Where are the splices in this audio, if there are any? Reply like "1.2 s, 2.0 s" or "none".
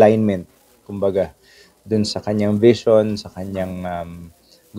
none